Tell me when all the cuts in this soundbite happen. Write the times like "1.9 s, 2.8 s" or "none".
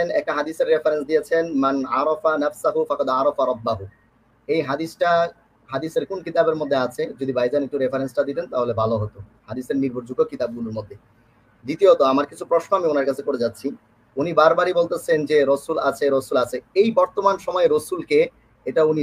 none